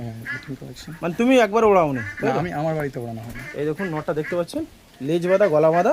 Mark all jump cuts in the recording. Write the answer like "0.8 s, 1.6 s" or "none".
none